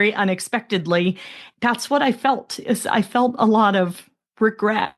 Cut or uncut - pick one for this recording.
cut